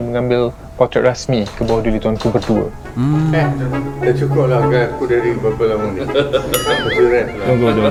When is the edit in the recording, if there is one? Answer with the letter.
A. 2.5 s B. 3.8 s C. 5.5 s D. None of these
D